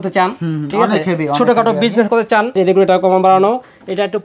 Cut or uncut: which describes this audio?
cut